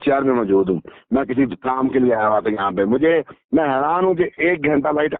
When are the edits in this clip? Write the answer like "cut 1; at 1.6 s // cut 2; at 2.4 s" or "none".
none